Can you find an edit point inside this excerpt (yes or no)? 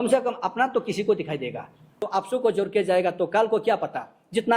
yes